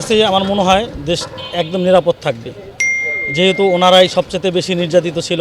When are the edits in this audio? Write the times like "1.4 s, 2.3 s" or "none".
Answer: none